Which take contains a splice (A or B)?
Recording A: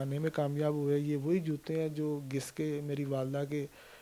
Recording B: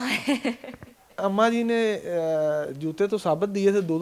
B